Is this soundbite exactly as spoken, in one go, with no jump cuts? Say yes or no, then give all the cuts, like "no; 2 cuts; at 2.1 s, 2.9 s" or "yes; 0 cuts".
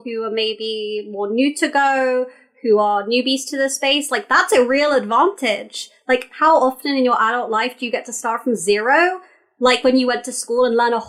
yes; 0 cuts